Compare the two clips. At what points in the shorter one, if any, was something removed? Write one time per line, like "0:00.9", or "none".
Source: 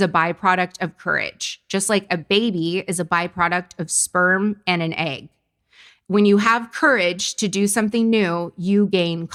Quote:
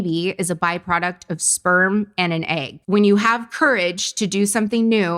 0:02.7